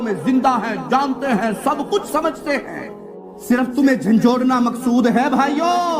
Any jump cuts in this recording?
yes; 1 cut; at 3.5 s

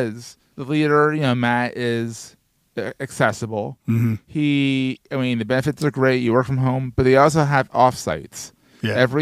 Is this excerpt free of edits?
yes; 0 cuts

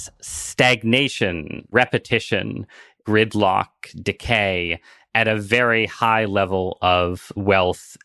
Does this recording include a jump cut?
no; 0 cuts

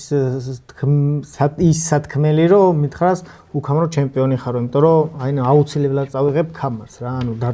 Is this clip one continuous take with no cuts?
yes; 0 cuts

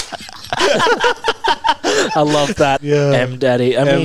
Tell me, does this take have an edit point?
yes; 1 cut; at 2.8 s

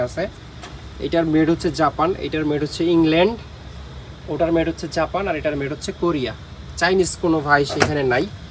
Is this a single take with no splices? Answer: yes; 0 cuts

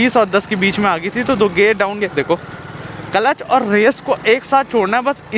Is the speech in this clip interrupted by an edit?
yes; 1 cut; at 2.1 s

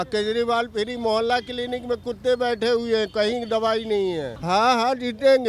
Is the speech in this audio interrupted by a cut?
yes; 1 cut; at 4.3 s

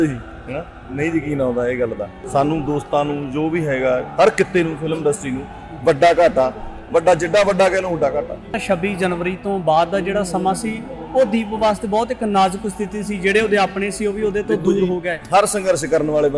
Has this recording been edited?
yes; 2 cuts; at 2.1 s, 8.5 s

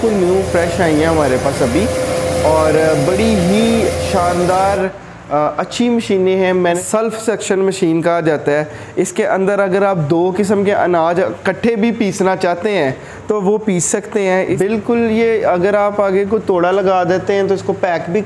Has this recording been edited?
yes; 2 cuts; at 6.8 s, 14.5 s

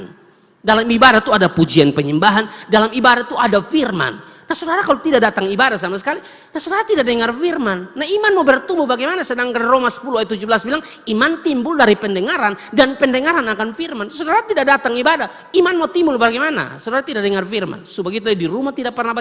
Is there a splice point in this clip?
no; 0 cuts

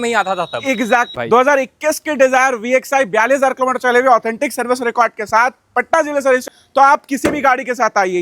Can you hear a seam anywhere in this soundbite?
yes; 2 cuts; at 1.2 s, 6.5 s

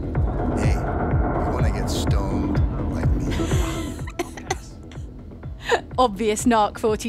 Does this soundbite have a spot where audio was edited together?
yes; 1 cut; at 5.9 s

